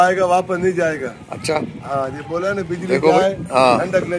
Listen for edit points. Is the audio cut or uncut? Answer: uncut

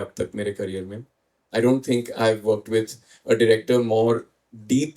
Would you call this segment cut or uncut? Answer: uncut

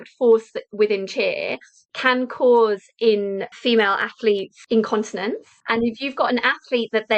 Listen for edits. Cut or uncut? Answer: cut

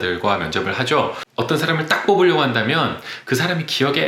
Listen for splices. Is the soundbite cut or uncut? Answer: cut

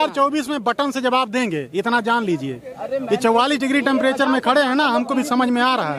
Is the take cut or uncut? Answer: uncut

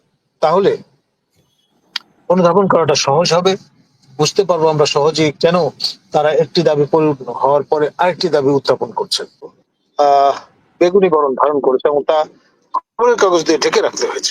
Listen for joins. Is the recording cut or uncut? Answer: cut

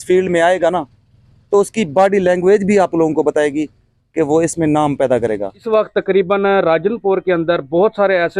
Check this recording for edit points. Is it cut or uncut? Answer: cut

